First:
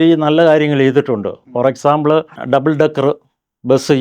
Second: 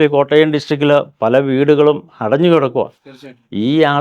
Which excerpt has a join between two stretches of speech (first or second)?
first